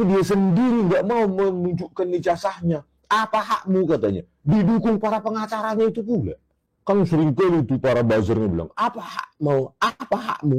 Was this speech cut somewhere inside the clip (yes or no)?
yes